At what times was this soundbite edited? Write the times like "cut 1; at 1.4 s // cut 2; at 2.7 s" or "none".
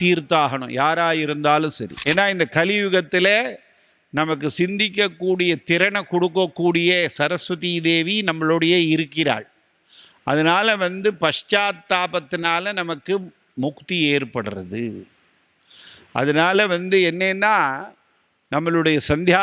cut 1; at 1.9 s

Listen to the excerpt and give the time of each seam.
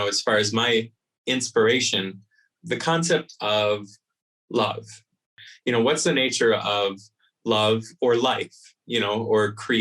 cut 1; at 5.3 s

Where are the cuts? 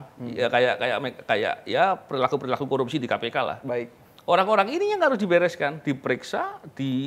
none

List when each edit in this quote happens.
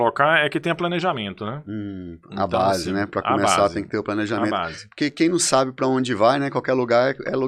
none

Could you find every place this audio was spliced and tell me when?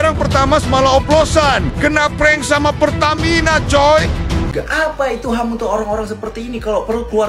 cut 1; at 4.5 s

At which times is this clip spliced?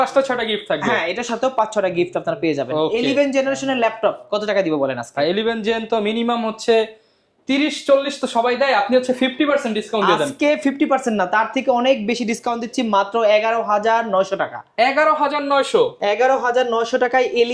none

